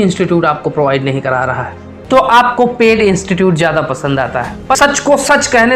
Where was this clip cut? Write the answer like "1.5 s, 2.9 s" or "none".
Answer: 1.9 s, 4.8 s